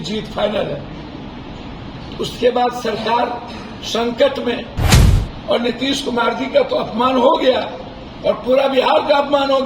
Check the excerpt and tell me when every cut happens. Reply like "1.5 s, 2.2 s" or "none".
4.9 s